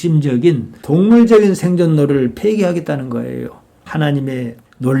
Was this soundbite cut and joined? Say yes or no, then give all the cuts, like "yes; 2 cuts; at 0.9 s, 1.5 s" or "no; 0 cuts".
yes; 1 cut; at 3.8 s